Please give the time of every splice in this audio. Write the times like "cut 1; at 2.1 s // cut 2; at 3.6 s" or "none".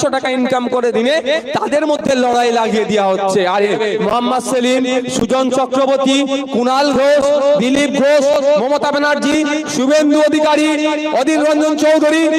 cut 1; at 3.7 s